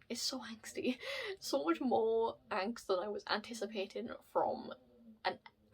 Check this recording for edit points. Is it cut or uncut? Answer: uncut